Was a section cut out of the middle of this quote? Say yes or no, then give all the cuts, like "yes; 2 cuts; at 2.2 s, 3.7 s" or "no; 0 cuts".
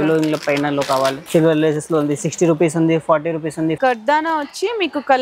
yes; 2 cuts; at 1.2 s, 3.8 s